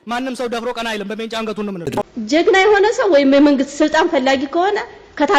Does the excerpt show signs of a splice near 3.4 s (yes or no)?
no